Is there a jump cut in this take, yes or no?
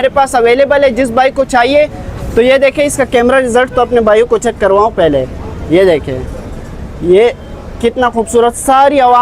no